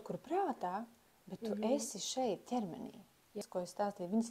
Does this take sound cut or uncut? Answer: cut